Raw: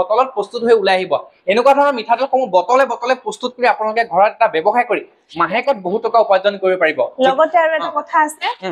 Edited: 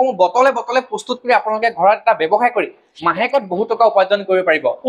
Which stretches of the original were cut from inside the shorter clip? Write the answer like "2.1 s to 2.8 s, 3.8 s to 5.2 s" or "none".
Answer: none